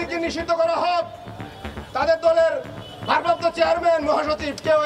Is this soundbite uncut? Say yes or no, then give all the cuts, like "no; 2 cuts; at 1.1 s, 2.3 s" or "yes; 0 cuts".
yes; 0 cuts